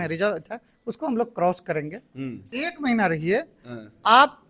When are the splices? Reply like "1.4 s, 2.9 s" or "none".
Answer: 2.5 s